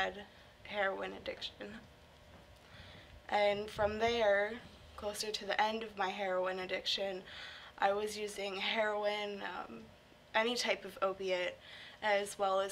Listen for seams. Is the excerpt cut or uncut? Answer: uncut